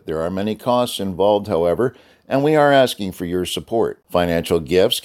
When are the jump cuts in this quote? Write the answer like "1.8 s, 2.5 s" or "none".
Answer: none